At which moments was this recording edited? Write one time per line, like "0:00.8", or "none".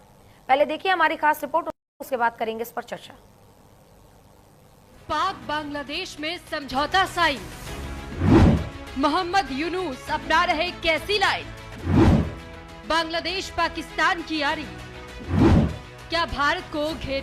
none